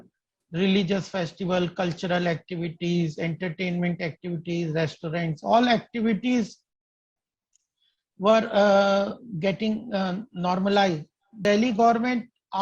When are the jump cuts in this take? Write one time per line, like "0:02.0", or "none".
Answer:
0:11.4